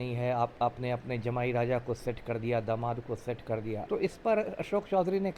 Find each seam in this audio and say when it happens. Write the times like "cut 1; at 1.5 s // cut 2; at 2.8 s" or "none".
cut 1; at 3.8 s